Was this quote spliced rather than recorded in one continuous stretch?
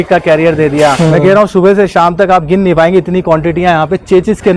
yes; 1 cut; at 1.1 s

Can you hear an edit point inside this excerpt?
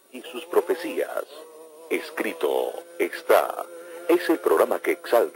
yes; 1 cut; at 4.4 s

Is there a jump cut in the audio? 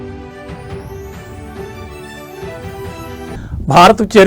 yes; 1 cut; at 2.5 s

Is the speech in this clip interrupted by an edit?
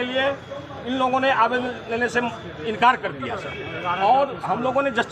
no; 0 cuts

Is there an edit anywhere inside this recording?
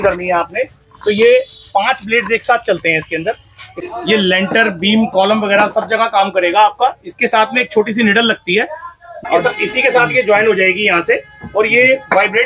yes; 2 cuts; at 3.8 s, 9.1 s

